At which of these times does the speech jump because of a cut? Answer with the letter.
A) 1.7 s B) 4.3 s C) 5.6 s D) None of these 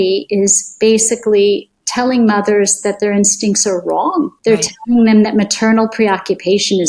B